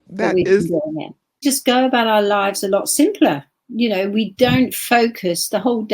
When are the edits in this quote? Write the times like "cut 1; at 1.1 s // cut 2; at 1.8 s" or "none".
cut 1; at 1.4 s